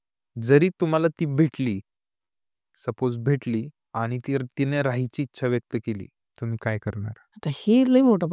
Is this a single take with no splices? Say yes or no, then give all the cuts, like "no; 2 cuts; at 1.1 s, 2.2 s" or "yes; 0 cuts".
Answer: no; 3 cuts; at 3.8 s, 6.2 s, 7.2 s